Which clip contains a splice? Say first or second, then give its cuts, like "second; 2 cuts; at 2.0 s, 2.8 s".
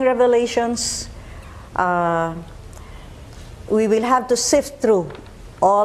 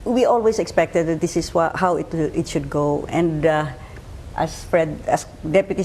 second; 1 cut; at 2.0 s